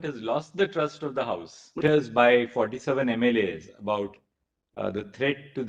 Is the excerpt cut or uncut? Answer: cut